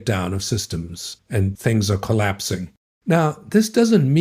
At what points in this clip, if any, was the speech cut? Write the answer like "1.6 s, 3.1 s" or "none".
1.5 s, 2.7 s

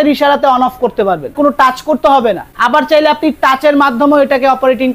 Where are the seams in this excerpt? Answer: 1.3 s, 2.5 s

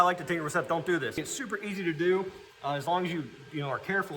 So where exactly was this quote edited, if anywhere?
1.2 s

